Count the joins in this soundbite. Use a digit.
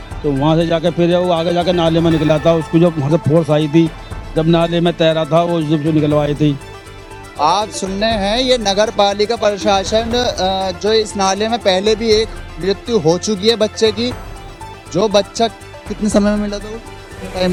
0